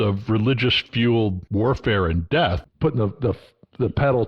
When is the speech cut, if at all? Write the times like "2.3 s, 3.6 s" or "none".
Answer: 0.9 s, 2.6 s